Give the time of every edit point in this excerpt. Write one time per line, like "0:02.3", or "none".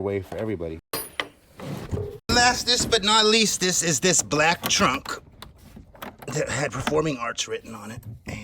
0:00.9
0:02.3